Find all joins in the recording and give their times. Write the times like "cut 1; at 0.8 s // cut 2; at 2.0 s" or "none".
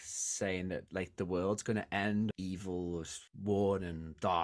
cut 1; at 2.3 s